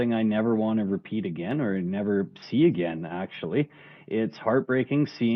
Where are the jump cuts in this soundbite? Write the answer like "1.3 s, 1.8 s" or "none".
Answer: none